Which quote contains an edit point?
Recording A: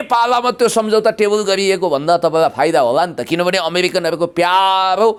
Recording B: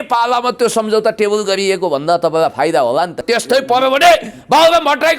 B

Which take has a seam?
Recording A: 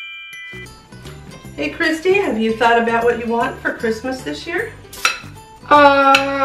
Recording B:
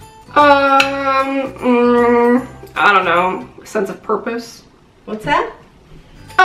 A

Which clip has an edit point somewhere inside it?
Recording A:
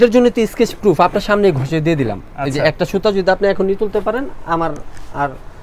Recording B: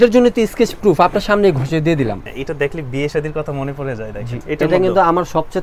B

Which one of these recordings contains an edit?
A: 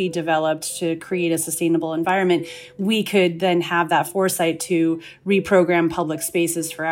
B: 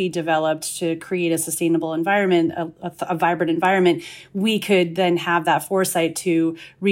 A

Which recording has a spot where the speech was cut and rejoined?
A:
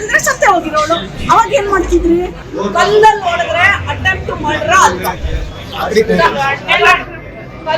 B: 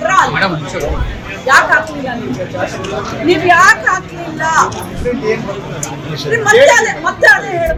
A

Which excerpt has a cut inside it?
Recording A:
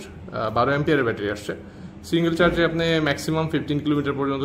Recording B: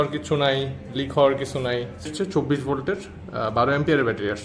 B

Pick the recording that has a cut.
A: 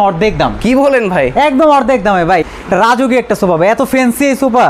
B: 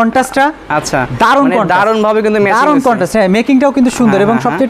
A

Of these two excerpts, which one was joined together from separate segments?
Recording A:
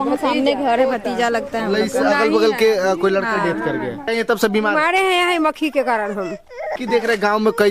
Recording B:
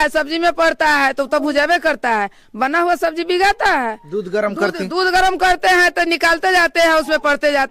A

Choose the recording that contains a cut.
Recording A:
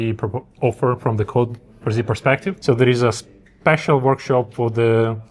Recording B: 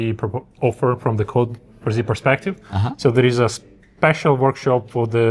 A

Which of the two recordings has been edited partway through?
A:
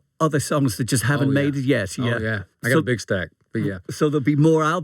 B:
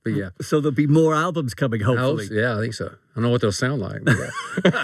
A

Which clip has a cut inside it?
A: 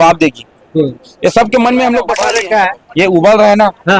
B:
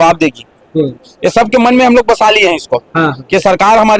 A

